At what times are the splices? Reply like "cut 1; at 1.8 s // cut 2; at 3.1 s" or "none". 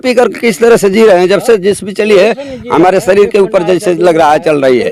none